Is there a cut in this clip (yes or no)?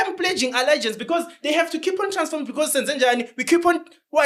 no